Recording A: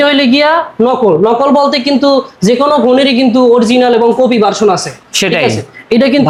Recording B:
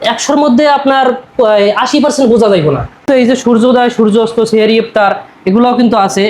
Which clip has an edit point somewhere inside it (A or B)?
B